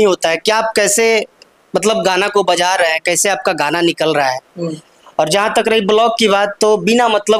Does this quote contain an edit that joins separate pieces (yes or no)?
no